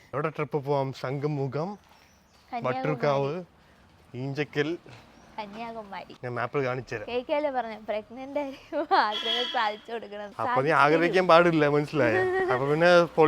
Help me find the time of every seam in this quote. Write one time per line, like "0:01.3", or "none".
0:06.1
0:10.3